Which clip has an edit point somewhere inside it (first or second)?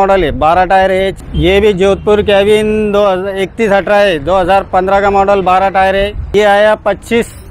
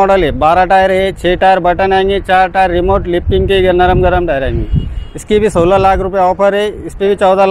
first